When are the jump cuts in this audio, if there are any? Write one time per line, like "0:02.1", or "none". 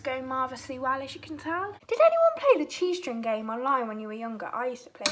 0:01.7